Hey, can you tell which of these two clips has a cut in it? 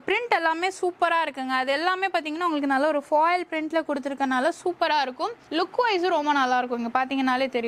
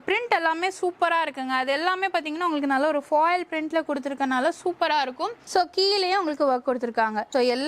second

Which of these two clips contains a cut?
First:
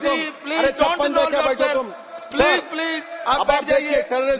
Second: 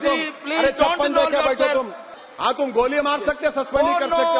second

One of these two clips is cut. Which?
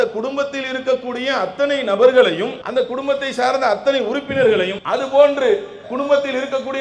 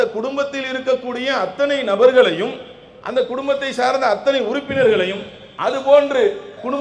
first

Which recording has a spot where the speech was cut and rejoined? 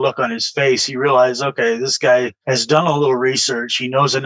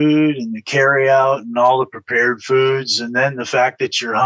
first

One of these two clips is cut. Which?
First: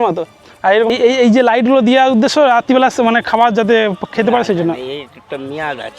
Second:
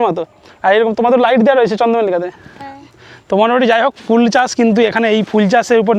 first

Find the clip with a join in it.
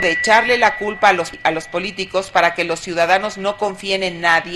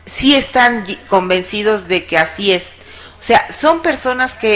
first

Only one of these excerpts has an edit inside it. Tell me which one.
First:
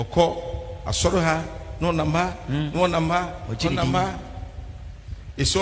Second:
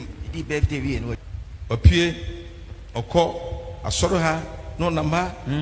second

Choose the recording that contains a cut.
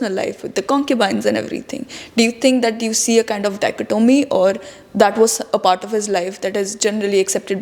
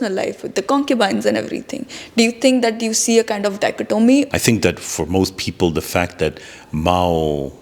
second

